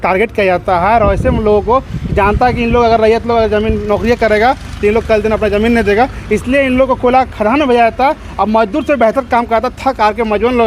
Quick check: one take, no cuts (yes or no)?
yes